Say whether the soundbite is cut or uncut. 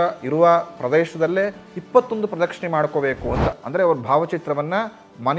cut